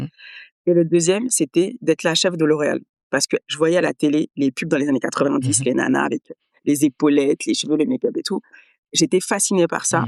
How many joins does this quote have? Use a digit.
0